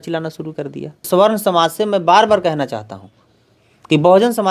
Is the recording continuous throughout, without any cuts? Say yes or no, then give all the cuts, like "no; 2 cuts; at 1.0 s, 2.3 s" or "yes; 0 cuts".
no; 1 cut; at 1.0 s